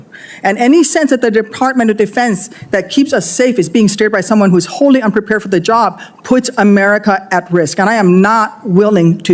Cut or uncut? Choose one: uncut